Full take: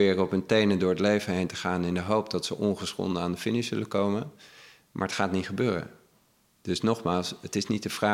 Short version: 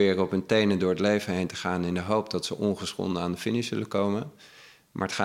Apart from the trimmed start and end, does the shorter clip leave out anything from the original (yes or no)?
no